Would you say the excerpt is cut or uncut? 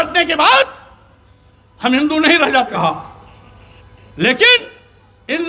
cut